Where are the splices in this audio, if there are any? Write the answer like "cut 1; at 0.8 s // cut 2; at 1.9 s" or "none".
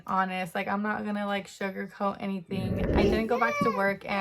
cut 1; at 2.8 s